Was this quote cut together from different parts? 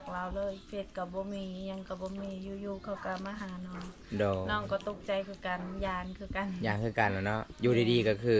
no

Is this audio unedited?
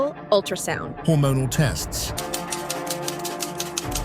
no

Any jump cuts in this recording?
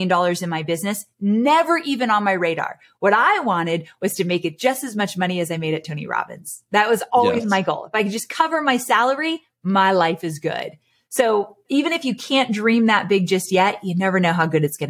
no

